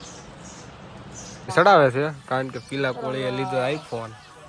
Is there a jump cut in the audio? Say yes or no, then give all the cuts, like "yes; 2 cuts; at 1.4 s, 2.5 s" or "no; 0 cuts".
yes; 1 cut; at 1.5 s